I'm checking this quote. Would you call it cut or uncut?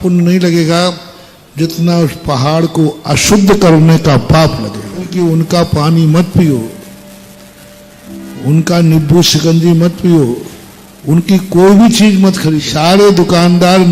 cut